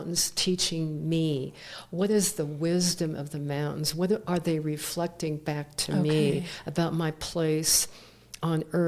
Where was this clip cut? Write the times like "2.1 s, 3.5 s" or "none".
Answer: none

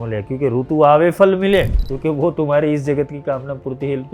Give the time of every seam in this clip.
1.8 s

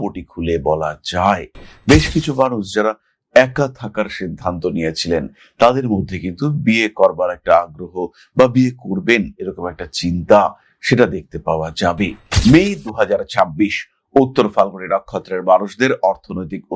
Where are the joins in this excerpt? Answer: 12.2 s

